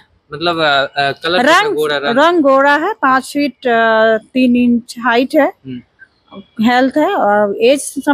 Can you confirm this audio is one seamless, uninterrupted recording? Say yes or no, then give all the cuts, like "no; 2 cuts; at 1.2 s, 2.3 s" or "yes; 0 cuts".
yes; 0 cuts